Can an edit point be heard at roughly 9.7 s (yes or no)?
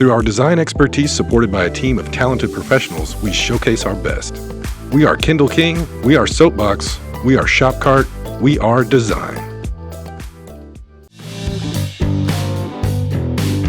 no